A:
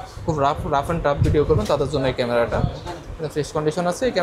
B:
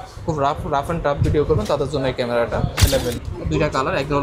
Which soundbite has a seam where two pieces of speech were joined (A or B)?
B